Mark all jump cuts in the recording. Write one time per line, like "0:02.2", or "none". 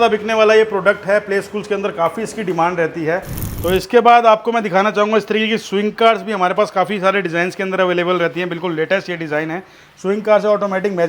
0:03.5